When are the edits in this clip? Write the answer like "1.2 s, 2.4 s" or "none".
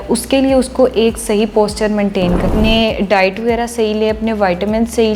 2.5 s